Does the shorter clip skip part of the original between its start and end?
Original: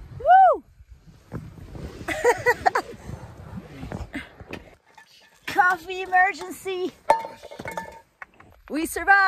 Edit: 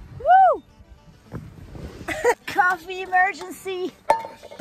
yes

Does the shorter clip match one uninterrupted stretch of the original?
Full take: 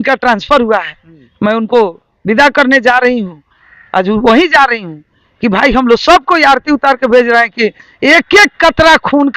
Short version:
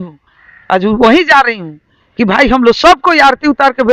yes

